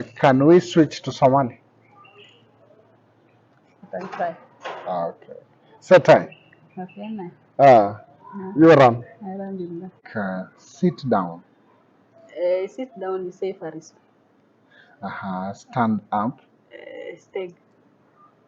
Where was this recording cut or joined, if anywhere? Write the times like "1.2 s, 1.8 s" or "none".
10.0 s